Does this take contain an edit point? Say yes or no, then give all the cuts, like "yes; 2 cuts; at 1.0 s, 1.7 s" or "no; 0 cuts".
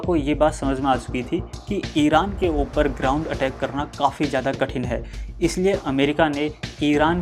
no; 0 cuts